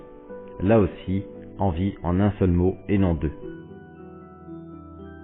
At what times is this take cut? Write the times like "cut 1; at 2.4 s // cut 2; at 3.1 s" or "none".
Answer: none